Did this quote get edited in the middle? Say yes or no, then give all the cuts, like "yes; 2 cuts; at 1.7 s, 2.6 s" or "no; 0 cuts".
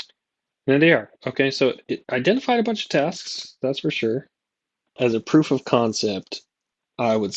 yes; 2 cuts; at 1.9 s, 5.0 s